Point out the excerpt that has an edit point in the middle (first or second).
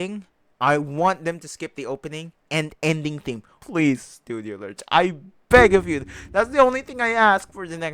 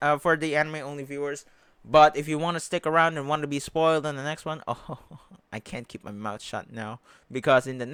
first